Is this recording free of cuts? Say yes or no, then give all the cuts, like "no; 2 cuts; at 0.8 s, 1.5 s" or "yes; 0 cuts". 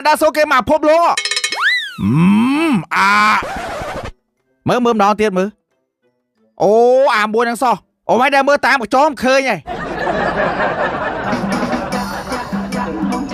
yes; 0 cuts